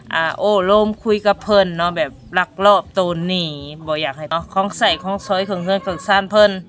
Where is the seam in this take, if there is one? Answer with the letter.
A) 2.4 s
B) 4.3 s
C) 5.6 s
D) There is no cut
B